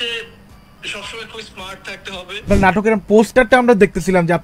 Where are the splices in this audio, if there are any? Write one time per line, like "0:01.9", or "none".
0:02.5